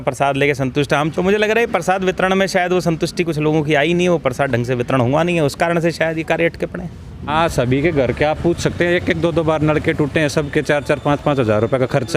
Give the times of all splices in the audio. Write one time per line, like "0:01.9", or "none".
0:01.1
0:07.3